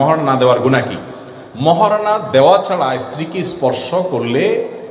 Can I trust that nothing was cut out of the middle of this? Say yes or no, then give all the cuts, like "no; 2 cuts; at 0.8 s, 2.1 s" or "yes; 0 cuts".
yes; 0 cuts